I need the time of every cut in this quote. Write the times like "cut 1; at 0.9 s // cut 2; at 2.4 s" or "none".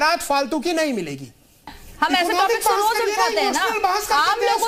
cut 1; at 1.6 s